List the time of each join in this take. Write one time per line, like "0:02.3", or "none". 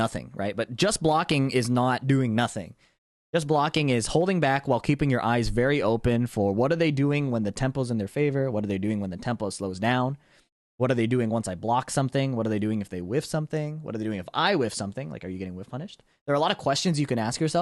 none